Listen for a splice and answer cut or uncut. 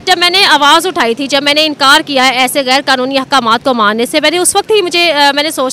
uncut